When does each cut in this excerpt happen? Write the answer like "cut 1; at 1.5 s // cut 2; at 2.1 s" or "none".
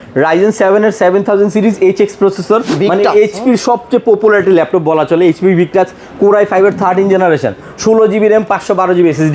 cut 1; at 2.7 s